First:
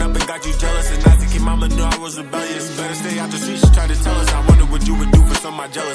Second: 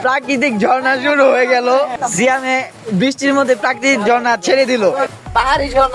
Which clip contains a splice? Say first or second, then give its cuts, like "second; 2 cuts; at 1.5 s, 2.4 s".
second; 2 cuts; at 1.9 s, 5.1 s